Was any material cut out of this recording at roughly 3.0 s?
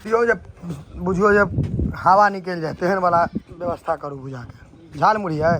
no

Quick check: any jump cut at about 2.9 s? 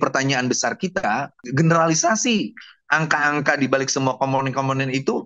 no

